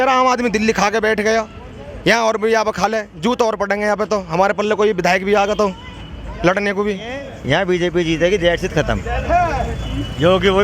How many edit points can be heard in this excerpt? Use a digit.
1